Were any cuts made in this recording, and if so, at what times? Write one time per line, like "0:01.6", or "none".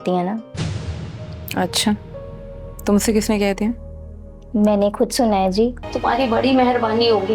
0:05.9